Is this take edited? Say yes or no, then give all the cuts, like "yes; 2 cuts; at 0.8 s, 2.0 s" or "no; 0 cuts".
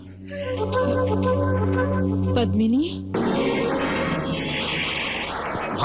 yes; 1 cut; at 3.1 s